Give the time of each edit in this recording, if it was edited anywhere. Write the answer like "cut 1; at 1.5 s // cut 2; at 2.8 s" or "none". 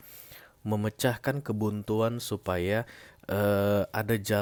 none